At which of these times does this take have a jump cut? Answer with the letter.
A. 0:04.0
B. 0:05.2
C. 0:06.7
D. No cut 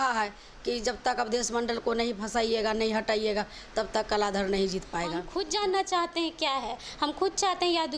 B